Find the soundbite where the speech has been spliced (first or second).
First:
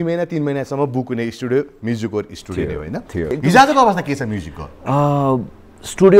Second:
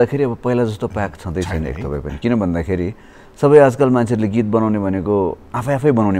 first